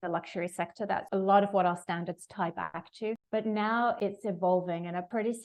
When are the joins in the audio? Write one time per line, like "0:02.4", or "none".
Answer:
none

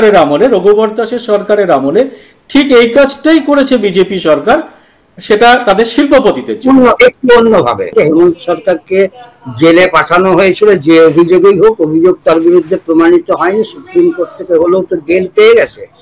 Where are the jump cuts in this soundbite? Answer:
0:07.9

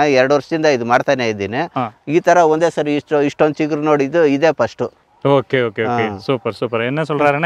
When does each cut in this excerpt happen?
none

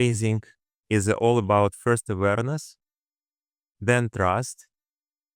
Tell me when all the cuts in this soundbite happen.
none

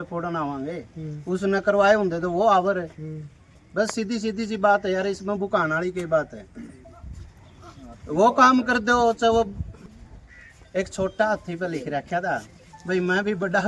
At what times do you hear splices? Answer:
0:09.8

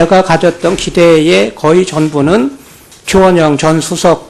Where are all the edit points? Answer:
0:02.1

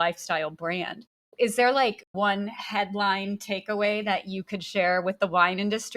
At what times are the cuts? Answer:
0:01.2
0:02.1

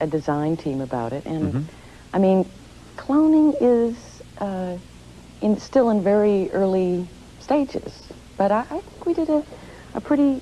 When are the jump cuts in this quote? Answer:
none

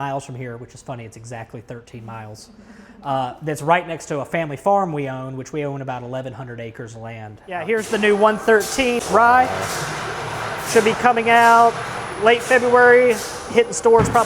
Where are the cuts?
0:07.6
0:09.0

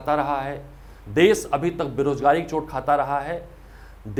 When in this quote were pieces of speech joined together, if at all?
none

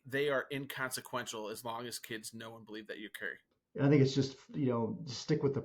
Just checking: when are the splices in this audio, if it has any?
0:03.5

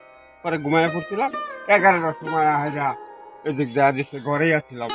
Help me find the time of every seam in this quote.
none

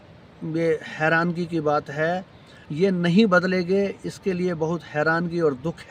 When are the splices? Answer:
0:02.6

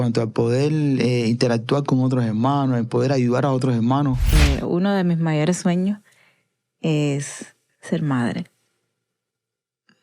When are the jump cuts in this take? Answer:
0:04.4

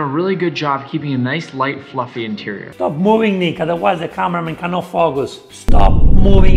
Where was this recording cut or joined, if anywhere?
none

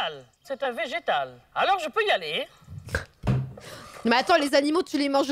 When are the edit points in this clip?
0:01.4

